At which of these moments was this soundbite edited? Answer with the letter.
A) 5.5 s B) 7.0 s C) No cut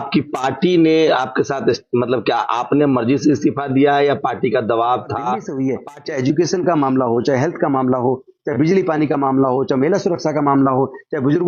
A